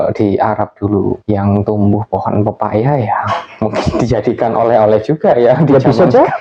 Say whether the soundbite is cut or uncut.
cut